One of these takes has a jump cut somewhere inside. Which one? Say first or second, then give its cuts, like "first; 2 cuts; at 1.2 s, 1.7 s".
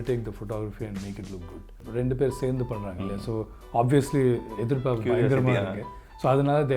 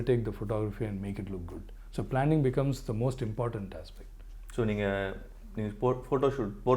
first; 1 cut; at 1.8 s